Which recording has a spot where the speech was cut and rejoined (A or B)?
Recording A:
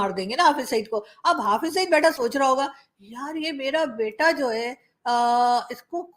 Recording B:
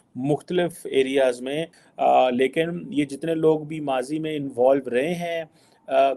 B